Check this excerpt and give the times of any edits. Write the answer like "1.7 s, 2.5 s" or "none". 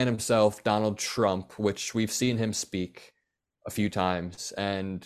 none